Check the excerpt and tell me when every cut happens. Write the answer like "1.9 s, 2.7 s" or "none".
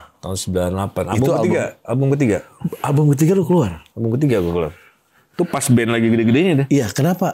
none